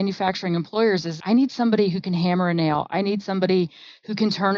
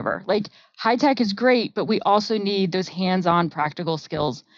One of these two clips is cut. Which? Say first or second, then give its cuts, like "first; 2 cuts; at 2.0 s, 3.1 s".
first; 1 cut; at 1.1 s